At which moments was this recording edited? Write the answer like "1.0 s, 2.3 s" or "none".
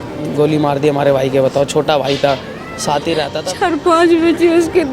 3.4 s